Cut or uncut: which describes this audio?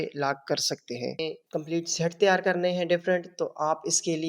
cut